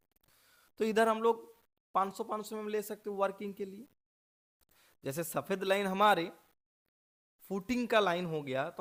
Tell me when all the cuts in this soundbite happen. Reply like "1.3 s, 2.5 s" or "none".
none